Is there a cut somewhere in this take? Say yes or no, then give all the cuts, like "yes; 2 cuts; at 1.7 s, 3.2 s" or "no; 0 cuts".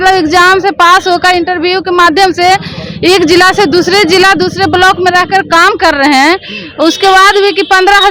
no; 0 cuts